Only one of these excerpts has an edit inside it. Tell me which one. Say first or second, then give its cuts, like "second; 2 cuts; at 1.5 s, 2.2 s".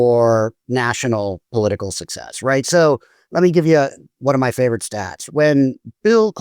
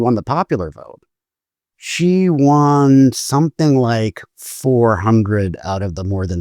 first; 2 cuts; at 3.2 s, 4.1 s